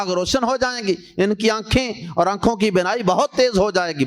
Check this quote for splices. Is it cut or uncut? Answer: uncut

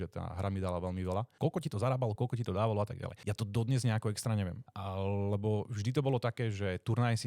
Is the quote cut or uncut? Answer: cut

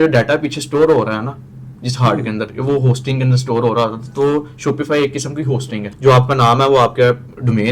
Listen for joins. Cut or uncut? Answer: cut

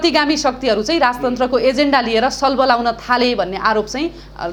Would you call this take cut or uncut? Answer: uncut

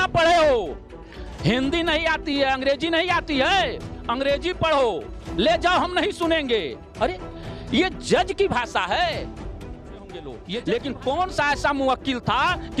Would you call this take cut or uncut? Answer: cut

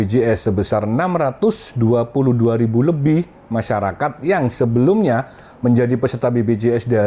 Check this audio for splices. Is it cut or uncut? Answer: uncut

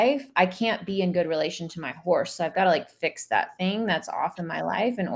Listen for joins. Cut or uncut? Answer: uncut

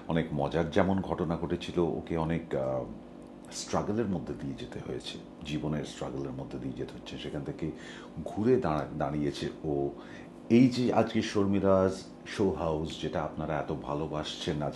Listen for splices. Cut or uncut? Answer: uncut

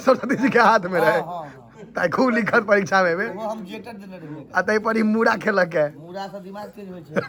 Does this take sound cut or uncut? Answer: uncut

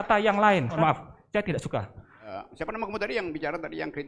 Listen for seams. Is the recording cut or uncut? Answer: cut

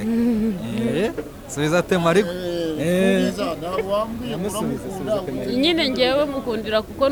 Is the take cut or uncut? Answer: uncut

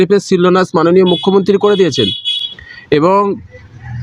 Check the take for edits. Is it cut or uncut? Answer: uncut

